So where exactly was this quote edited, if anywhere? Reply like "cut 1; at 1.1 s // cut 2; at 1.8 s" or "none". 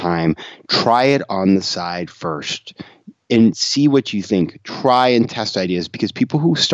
none